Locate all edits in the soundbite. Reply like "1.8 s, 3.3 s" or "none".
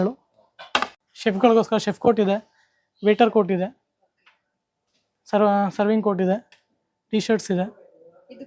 0.9 s